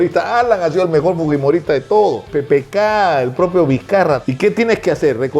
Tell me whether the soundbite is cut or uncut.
cut